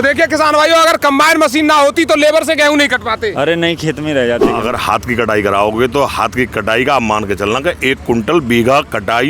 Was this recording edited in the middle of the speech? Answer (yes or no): yes